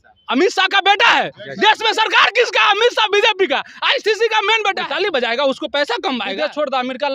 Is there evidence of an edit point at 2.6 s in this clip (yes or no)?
no